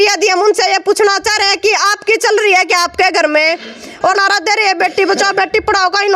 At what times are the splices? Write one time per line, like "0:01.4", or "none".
0:04.2